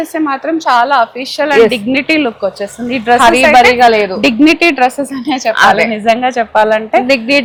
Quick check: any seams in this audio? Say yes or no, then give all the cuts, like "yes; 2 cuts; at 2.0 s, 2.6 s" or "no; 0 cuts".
no; 0 cuts